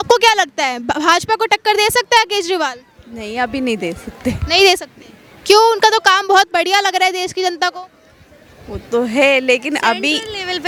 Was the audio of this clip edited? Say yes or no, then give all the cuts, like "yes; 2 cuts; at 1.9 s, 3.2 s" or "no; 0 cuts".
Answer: no; 0 cuts